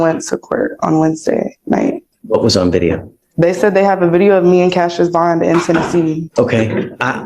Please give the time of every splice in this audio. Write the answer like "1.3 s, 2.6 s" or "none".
2.1 s, 6.3 s